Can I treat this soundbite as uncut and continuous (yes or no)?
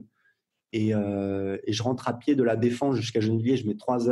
yes